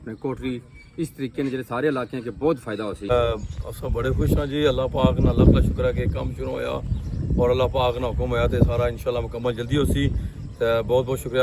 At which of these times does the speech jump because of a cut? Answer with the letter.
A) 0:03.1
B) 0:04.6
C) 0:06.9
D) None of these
A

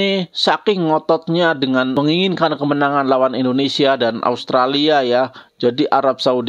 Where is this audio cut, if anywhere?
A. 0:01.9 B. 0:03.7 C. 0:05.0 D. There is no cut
A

